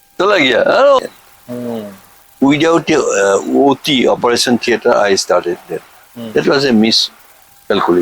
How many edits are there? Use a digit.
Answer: 1